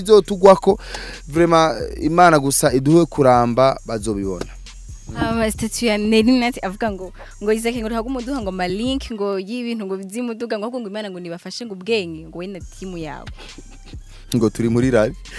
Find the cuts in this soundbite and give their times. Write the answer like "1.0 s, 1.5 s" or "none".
none